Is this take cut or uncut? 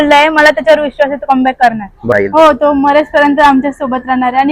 cut